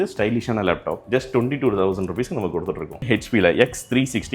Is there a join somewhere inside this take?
yes; 2 cuts; at 1.0 s, 3.0 s

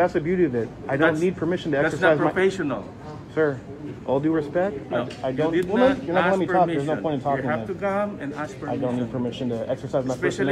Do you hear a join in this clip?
no; 0 cuts

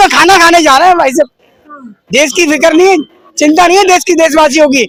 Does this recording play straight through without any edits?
yes; 0 cuts

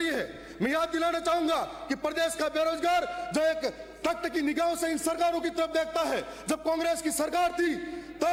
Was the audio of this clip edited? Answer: no; 0 cuts

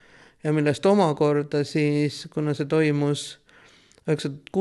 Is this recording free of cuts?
yes; 0 cuts

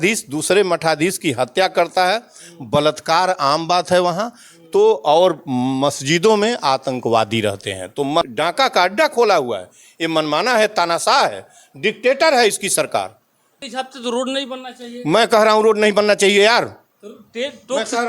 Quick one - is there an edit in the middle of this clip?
yes; 2 cuts; at 8.3 s, 13.6 s

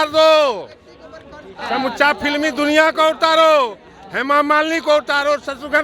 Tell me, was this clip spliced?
no; 0 cuts

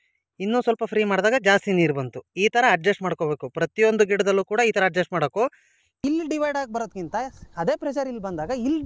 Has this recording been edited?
yes; 1 cut; at 6.0 s

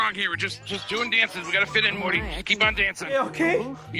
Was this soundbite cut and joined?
no; 0 cuts

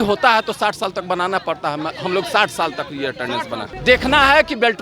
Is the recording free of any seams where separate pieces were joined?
no; 1 cut; at 3.7 s

